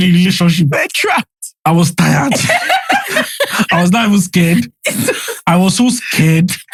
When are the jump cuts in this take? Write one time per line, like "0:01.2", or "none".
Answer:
none